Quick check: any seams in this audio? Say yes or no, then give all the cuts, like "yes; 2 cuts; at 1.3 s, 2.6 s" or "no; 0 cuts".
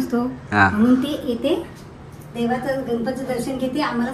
no; 0 cuts